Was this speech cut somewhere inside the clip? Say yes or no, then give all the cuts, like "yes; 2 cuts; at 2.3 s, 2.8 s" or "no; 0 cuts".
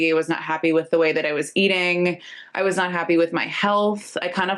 no; 0 cuts